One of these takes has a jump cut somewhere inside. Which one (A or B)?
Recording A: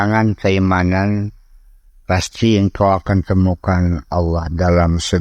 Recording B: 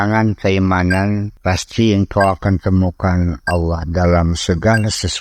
B